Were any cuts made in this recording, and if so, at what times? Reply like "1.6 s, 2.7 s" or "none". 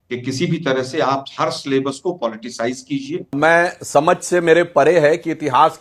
3.3 s

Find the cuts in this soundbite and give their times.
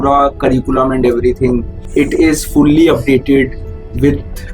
1.8 s

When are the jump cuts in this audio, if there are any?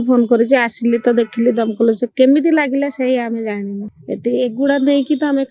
3.9 s

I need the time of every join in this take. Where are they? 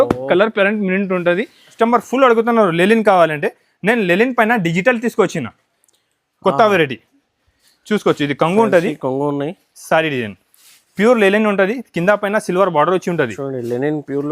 1.6 s

